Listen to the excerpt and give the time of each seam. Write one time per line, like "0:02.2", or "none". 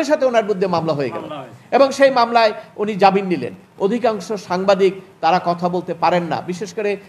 0:03.7